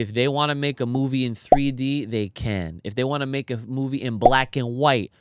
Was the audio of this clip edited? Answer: no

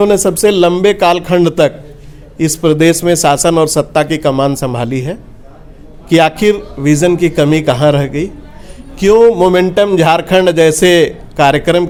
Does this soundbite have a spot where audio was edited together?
no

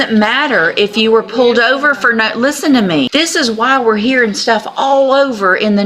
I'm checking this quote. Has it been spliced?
yes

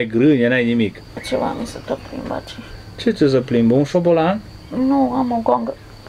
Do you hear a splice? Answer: yes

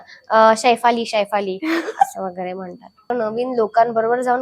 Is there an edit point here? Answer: yes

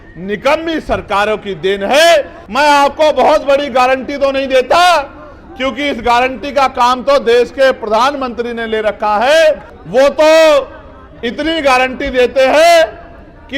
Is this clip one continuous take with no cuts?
no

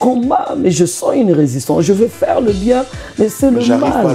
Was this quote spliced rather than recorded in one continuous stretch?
no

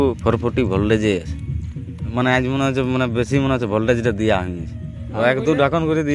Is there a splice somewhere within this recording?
yes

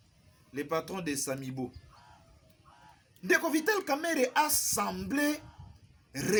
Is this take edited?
no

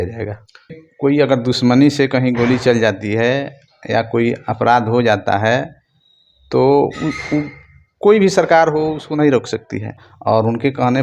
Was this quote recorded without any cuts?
no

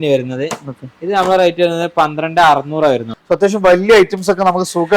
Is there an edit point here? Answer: yes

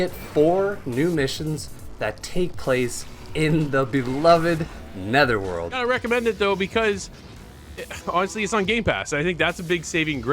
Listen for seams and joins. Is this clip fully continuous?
no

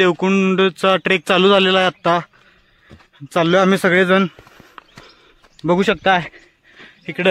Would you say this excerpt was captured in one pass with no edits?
yes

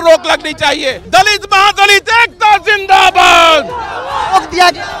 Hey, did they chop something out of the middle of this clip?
yes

